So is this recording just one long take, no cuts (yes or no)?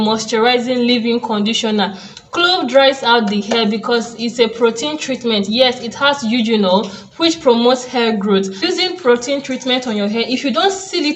no